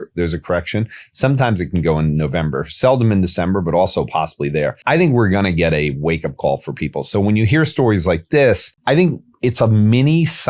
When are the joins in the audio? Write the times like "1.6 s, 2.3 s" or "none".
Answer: 4.8 s, 8.7 s